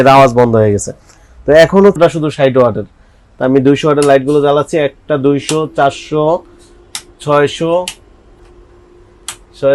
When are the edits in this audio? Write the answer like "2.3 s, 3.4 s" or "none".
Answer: 2.0 s